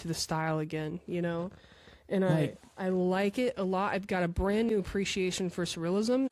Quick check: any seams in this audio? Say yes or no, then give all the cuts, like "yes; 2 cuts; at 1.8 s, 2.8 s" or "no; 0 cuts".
no; 0 cuts